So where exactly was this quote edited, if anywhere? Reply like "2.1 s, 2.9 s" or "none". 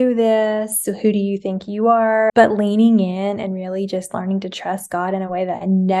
2.3 s